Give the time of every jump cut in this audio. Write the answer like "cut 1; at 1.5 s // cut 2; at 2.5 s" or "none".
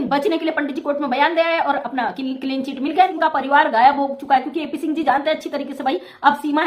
cut 1; at 3.1 s

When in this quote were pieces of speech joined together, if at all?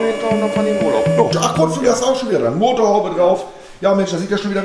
cut 1; at 1.3 s

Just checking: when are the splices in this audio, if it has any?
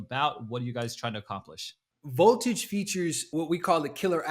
cut 1; at 3.2 s

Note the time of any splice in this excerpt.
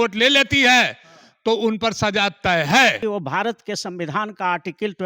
cut 1; at 3.0 s

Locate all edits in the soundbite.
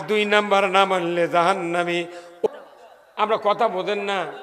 cut 1; at 2.3 s

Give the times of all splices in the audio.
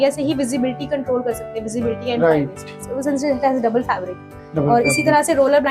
none

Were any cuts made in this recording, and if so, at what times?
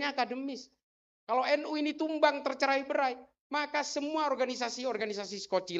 none

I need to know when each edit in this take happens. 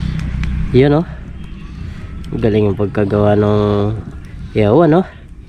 none

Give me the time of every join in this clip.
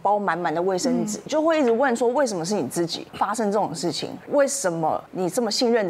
cut 1; at 1.3 s // cut 2; at 3.0 s // cut 3; at 4.1 s // cut 4; at 5.1 s

